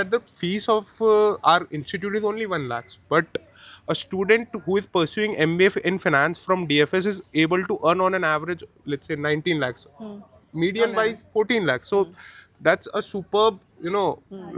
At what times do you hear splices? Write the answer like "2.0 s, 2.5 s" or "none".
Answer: none